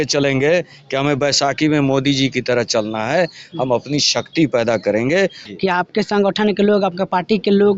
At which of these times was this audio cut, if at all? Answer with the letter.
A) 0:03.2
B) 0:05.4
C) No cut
B